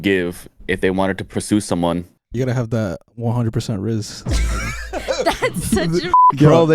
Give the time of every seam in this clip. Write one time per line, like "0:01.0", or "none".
0:01.2
0:02.3